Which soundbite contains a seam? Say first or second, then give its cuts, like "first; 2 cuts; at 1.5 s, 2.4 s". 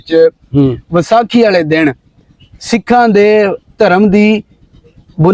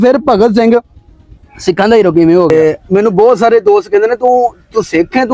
second; 1 cut; at 2.5 s